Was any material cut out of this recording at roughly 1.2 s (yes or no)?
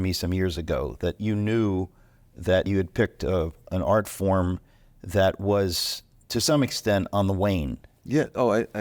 yes